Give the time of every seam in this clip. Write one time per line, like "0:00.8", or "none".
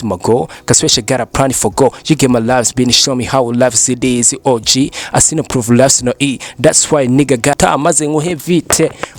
0:07.5